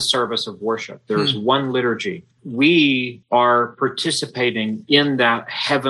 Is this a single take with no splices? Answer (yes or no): no